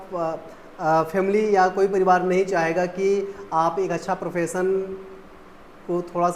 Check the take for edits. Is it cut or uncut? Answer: uncut